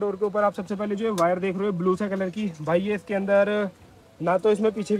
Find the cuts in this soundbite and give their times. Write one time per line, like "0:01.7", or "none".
none